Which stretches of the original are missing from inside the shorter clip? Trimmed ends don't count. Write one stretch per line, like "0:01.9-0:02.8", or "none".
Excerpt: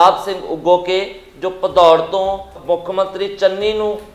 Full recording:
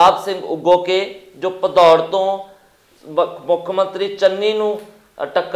0:02.6-0:03.4